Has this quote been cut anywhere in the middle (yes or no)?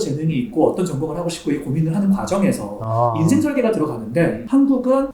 no